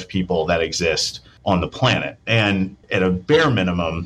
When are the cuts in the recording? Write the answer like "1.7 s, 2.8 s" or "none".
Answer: 2.8 s